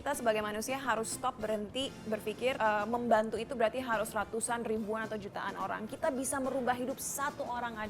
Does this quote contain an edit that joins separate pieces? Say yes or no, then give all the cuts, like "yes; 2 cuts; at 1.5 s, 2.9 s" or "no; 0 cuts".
yes; 1 cut; at 2.6 s